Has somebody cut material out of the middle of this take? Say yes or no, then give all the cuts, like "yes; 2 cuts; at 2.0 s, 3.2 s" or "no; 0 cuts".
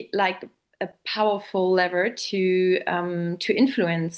no; 0 cuts